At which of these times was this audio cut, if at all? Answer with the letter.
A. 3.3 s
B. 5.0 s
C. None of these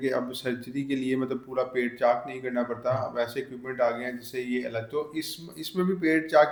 C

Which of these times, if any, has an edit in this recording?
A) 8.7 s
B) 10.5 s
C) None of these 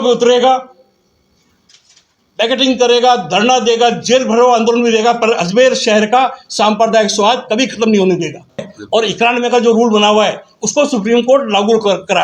A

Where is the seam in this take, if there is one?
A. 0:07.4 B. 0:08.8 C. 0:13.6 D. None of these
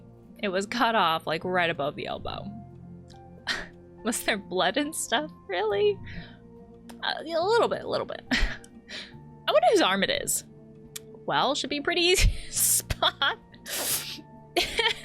C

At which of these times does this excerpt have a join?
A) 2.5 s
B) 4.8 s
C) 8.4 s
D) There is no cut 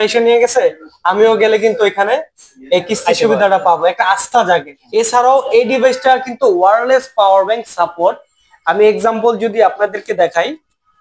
B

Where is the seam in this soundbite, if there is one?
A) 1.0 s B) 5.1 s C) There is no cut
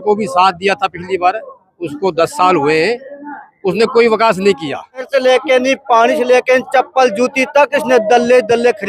B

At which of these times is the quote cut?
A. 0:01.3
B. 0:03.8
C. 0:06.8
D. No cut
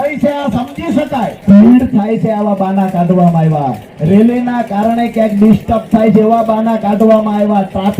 A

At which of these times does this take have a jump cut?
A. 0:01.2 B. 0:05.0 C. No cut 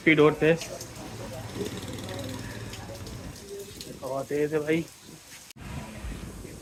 C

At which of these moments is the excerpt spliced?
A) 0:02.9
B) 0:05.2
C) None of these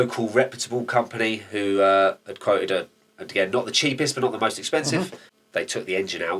B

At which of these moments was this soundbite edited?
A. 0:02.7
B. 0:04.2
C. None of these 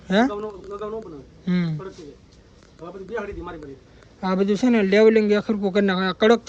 C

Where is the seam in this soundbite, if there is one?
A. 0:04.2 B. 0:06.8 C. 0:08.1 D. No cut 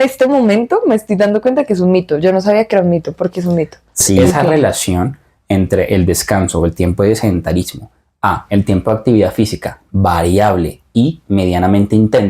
A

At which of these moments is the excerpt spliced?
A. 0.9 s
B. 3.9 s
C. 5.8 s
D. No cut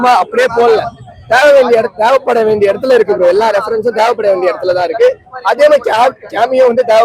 D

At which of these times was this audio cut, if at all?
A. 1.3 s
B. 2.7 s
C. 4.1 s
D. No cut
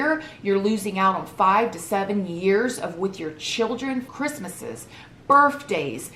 C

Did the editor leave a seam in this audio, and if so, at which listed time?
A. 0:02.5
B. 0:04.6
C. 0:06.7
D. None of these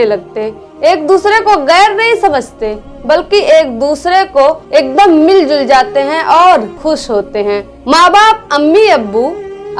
C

